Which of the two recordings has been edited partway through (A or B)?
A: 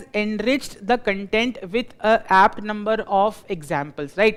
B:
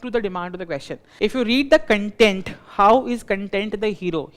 B